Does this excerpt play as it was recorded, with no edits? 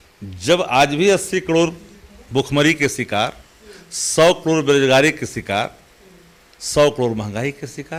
yes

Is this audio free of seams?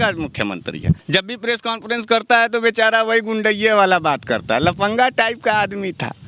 no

